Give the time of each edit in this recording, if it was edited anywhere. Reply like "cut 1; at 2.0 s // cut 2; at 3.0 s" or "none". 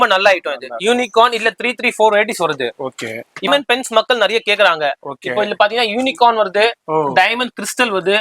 cut 1; at 3.5 s